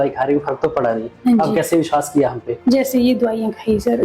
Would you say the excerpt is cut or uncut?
cut